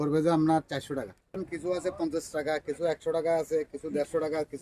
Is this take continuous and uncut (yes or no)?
no